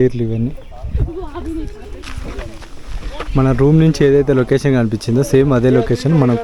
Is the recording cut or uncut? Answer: cut